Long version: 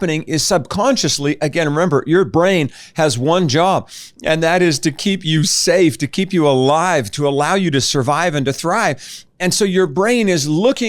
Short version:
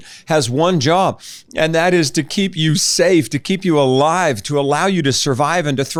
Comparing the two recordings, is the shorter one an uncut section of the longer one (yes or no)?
yes